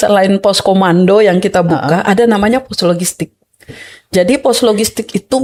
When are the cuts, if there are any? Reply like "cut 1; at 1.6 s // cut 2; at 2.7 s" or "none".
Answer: none